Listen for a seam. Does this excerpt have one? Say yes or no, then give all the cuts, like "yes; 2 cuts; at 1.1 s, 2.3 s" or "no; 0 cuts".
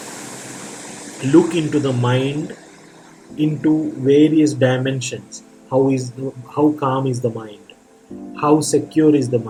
no; 0 cuts